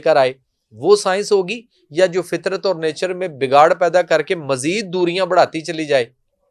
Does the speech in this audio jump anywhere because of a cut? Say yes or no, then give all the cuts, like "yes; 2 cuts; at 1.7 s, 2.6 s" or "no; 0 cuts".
no; 0 cuts